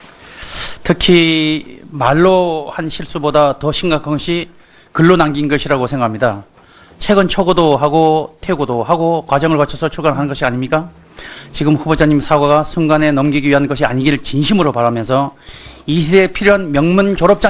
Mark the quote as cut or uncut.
cut